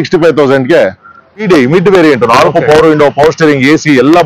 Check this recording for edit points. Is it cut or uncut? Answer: cut